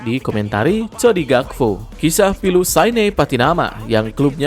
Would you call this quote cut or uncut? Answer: cut